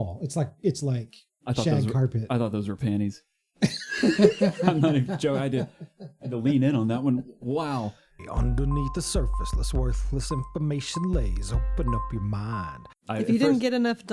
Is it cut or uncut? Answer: cut